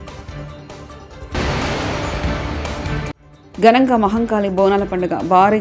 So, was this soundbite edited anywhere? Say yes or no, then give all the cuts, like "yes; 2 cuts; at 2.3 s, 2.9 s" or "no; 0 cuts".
yes; 2 cuts; at 1.3 s, 3.3 s